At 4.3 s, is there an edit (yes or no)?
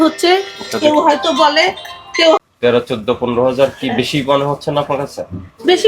no